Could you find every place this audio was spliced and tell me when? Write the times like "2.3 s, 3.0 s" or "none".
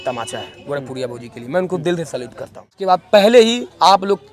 2.6 s

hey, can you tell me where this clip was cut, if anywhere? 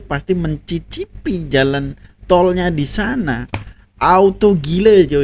none

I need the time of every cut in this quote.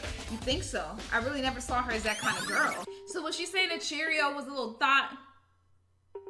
2.9 s

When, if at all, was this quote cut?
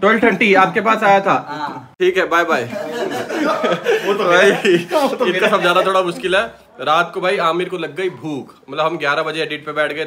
none

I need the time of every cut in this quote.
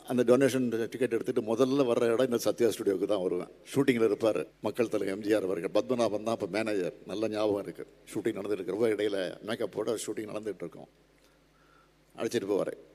3.6 s, 4.5 s, 8.1 s

